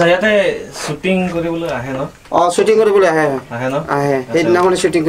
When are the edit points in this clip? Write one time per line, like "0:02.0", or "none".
none